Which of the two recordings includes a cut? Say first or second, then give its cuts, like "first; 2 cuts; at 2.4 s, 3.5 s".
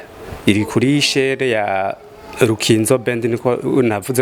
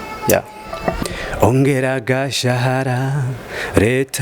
second; 1 cut; at 1.1 s